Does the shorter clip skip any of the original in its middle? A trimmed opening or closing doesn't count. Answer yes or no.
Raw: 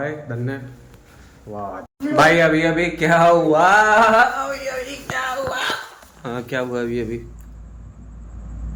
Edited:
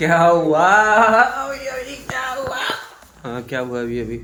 no